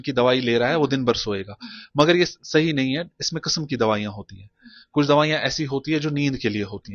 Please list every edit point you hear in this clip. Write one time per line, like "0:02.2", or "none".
none